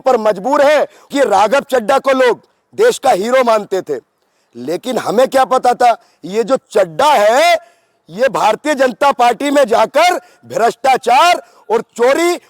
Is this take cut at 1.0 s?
yes; 1 cut; at 1.0 s

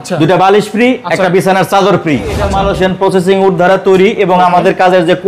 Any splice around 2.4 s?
yes; 1 cut; at 2.4 s

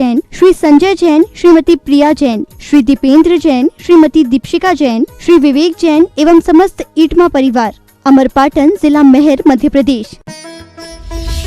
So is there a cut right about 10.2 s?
yes; 1 cut; at 10.2 s

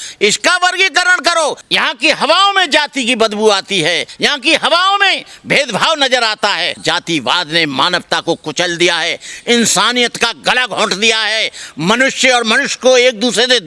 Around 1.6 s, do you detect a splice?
yes; 2 cuts; at 1.6 s, 4.1 s

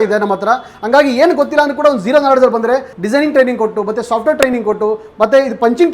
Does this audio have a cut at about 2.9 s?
yes; 1 cut; at 2.9 s

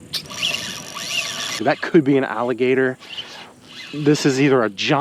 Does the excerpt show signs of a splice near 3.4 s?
no; 1 cut; at 1.6 s

